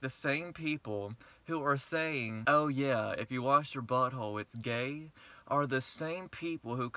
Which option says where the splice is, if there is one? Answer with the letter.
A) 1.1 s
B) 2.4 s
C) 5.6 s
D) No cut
B